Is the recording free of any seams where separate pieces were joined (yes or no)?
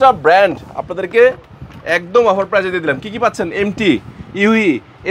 yes